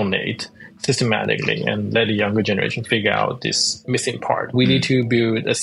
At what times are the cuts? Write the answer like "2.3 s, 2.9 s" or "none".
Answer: 4.5 s